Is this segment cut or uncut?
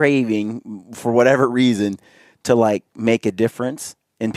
uncut